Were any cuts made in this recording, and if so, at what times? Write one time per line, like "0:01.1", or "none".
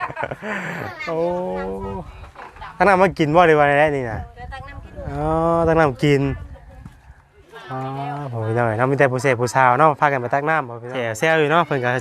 0:10.8